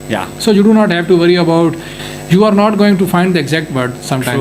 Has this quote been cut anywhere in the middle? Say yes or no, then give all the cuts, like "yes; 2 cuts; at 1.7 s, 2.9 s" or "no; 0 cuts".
yes; 1 cut; at 1.9 s